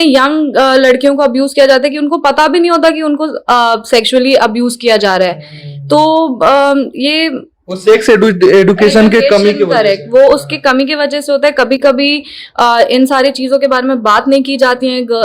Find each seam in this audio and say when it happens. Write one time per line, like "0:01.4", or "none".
none